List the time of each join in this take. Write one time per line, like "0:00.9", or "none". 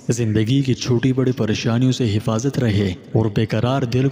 none